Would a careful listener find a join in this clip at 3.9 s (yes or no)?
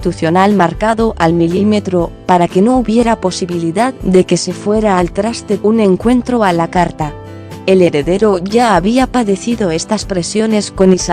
yes